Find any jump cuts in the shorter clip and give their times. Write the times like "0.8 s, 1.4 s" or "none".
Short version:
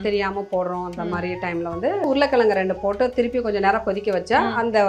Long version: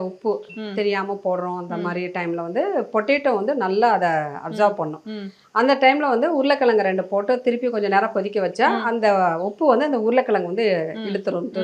2.0 s